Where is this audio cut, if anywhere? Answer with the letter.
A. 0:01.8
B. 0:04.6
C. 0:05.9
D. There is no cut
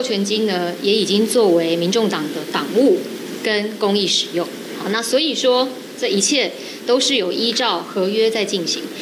D